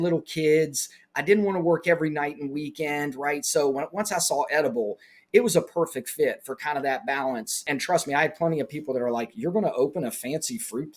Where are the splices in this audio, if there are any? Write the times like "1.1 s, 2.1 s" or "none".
7.6 s